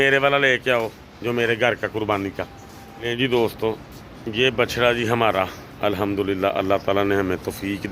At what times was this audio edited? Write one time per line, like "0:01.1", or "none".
0:03.1